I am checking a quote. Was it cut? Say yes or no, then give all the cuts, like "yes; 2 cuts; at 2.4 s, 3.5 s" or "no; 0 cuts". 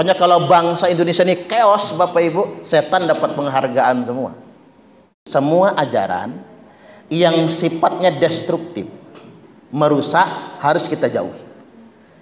yes; 1 cut; at 5.2 s